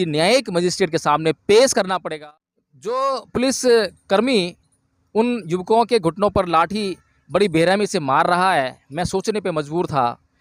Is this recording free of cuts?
no; 1 cut; at 2.1 s

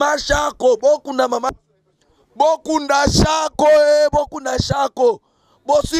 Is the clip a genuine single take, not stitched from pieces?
no; 1 cut; at 1.5 s

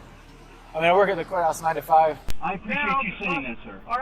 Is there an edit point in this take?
yes; 1 cut; at 2.3 s

